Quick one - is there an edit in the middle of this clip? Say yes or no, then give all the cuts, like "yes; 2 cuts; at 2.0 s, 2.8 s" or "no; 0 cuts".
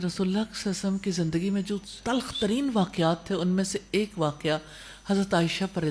no; 0 cuts